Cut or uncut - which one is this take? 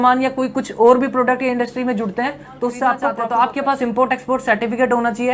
cut